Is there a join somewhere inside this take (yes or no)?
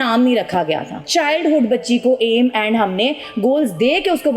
yes